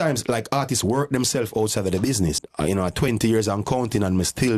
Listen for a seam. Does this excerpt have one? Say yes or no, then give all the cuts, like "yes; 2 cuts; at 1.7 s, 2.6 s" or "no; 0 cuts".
yes; 1 cut; at 2.4 s